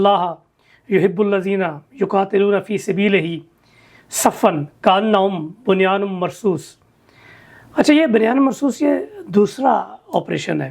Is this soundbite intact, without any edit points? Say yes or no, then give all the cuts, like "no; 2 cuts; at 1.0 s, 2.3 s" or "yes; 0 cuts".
yes; 0 cuts